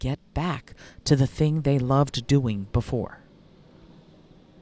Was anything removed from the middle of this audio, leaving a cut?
no; 0 cuts

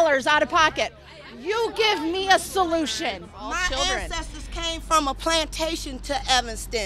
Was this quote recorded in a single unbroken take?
no; 1 cut; at 3.4 s

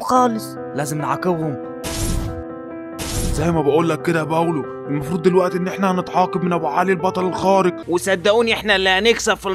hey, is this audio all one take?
no; 1 cut; at 7.8 s

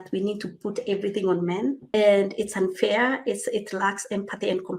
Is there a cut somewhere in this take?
yes; 1 cut; at 1.8 s

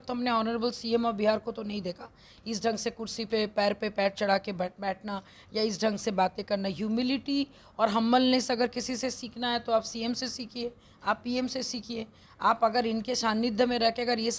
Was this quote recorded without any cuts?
yes; 0 cuts

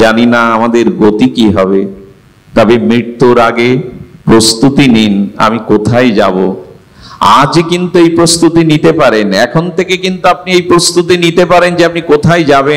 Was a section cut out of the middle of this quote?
no; 0 cuts

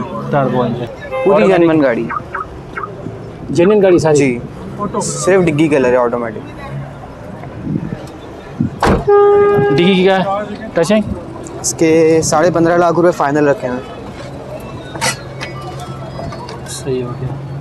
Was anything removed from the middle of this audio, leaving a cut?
no; 0 cuts

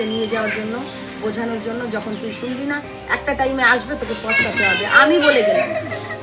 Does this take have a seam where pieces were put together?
no; 0 cuts

